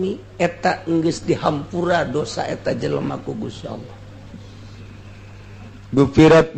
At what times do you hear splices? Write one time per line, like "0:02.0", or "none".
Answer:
0:05.2